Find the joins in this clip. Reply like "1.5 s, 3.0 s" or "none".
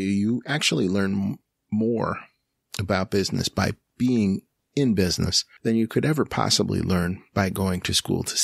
5.4 s